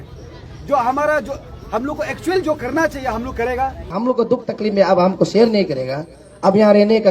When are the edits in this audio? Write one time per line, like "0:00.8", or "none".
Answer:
0:03.9